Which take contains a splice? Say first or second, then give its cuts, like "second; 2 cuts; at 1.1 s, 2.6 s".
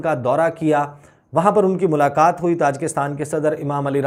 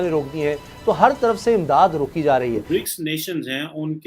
second; 1 cut; at 2.6 s